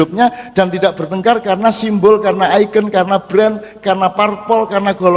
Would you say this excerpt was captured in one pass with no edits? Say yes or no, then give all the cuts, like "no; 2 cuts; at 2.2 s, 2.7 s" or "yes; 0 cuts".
yes; 0 cuts